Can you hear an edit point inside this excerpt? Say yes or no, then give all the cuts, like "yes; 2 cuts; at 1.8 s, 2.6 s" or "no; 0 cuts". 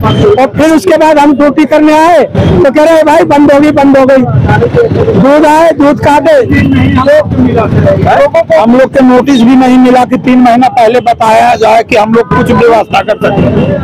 no; 0 cuts